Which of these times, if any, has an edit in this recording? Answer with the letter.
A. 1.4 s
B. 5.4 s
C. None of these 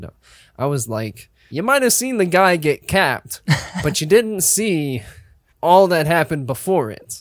A